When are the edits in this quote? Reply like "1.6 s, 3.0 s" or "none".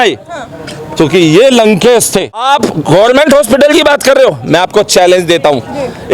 2.4 s

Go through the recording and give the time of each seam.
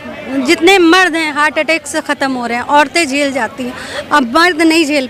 none

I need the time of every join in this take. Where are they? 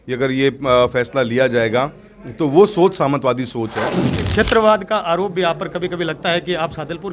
4.0 s

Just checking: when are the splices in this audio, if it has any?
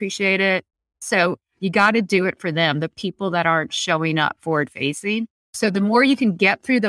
1.0 s, 5.5 s

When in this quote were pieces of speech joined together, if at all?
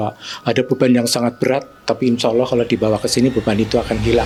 none

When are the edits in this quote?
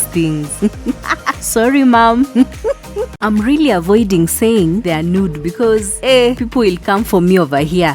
3.1 s

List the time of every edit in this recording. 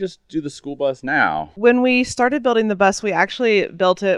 1.6 s

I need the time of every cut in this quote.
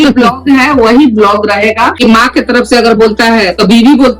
1.9 s

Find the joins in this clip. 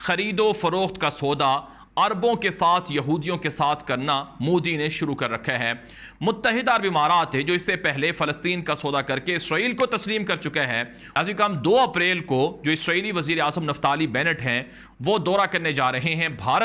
none

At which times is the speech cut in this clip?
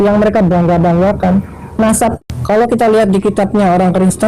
2.2 s

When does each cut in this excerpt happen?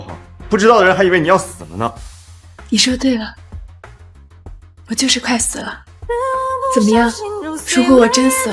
3.3 s, 4.7 s

